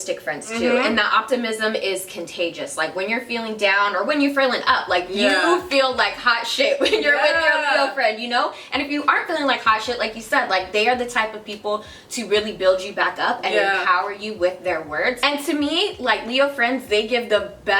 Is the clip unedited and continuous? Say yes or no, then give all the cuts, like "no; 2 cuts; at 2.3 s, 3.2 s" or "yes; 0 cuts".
yes; 0 cuts